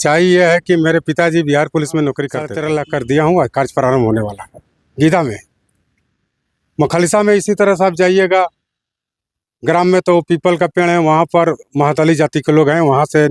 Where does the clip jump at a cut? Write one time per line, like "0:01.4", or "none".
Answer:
0:02.5